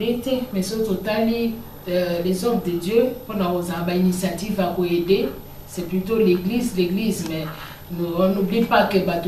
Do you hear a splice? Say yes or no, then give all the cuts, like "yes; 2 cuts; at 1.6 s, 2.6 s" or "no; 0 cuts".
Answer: no; 0 cuts